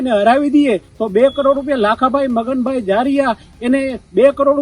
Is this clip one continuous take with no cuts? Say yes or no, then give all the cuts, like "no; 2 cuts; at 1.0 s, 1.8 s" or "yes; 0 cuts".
yes; 0 cuts